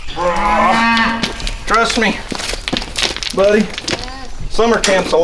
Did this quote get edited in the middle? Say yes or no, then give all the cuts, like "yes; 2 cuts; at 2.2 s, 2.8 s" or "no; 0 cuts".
no; 0 cuts